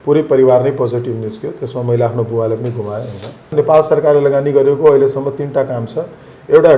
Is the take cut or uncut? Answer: cut